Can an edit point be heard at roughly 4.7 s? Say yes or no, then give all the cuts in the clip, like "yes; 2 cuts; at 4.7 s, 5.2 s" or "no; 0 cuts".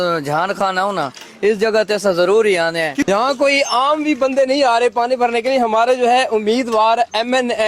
no; 1 cut; at 3.1 s